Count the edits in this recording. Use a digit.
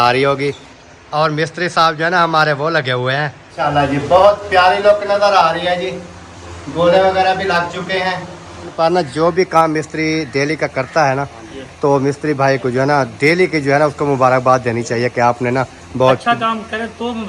2